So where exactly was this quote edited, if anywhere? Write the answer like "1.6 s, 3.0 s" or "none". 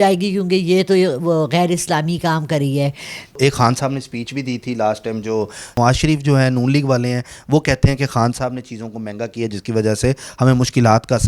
3.4 s, 5.8 s